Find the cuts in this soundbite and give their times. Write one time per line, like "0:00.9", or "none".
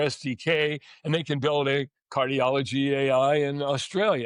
none